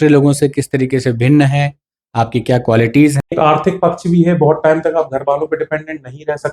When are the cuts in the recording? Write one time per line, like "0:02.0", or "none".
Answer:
0:03.3

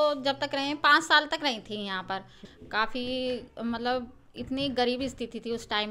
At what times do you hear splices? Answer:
0:02.4

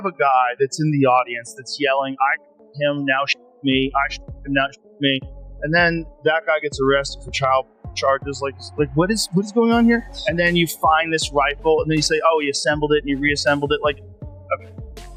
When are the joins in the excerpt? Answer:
none

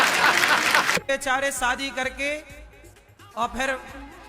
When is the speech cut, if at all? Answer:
0:01.0

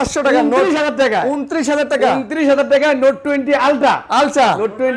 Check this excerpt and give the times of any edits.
none

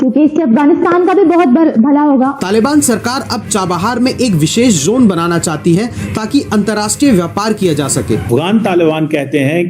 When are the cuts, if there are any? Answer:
0:02.4
0:08.2

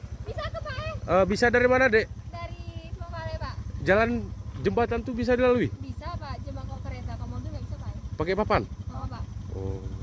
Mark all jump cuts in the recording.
none

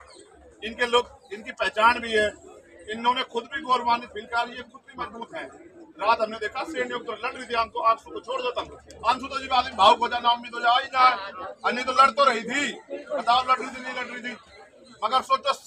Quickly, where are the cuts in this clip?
none

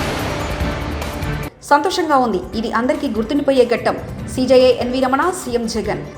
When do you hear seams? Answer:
0:01.4

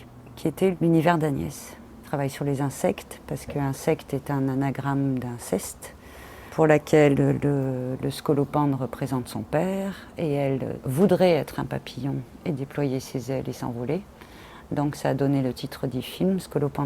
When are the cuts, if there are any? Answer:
0:00.7
0:02.0
0:06.5
0:10.8

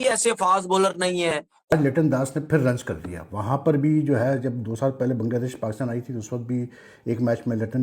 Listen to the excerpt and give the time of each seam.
0:01.6

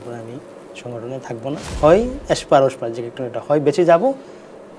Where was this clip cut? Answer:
0:01.7

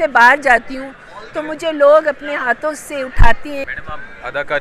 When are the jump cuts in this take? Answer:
0:03.7

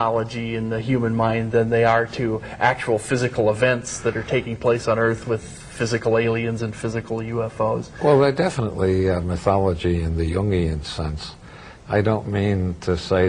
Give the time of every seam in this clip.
0:02.9

